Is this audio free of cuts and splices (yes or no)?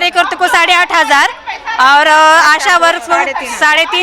yes